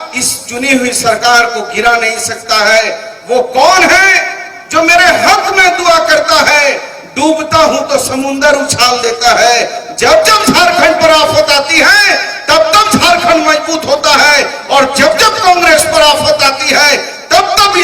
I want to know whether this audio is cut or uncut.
uncut